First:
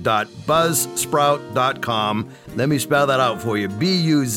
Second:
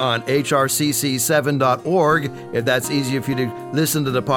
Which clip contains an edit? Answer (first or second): first